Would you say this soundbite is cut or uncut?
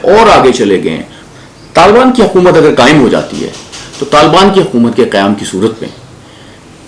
cut